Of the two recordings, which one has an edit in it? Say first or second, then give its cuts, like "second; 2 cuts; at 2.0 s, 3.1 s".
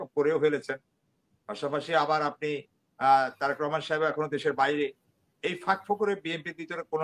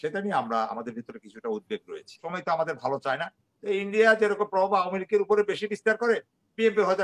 second; 1 cut; at 2.2 s